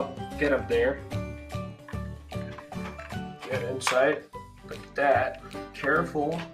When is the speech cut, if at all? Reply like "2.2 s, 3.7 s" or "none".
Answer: 3.8 s